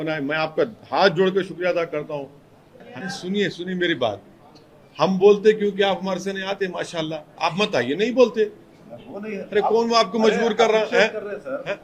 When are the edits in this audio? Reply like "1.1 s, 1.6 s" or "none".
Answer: 3.0 s

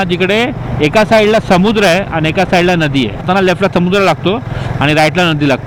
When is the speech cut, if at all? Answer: none

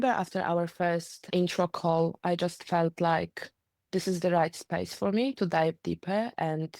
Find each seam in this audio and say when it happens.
1.2 s

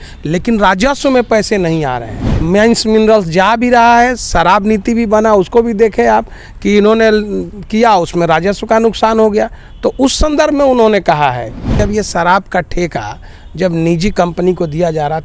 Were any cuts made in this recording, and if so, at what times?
2.3 s, 11.8 s

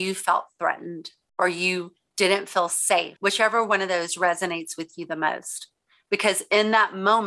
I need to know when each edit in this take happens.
3.1 s

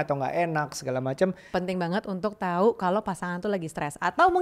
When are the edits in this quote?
1.5 s

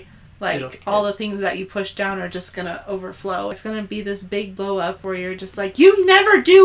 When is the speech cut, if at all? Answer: 3.6 s

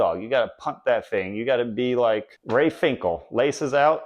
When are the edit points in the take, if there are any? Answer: 2.3 s

